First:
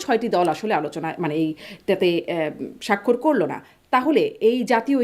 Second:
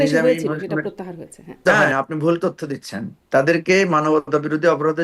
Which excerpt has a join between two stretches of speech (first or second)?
second